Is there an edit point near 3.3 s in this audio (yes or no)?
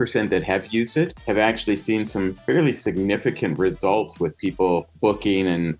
no